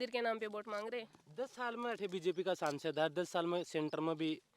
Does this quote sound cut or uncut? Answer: uncut